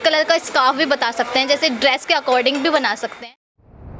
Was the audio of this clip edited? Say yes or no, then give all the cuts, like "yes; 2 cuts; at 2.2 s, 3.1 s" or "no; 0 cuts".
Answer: yes; 1 cut; at 3.1 s